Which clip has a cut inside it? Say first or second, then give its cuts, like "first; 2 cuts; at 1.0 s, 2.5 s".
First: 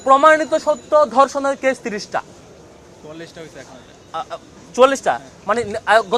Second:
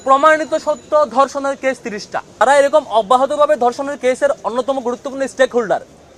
second; 1 cut; at 2.4 s